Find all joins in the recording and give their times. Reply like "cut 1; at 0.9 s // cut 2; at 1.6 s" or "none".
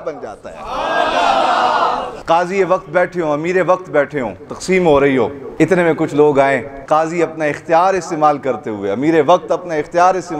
cut 1; at 2.1 s // cut 2; at 4.5 s // cut 3; at 5.4 s // cut 4; at 6.8 s